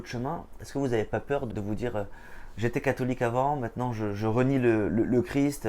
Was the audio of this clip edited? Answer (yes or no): yes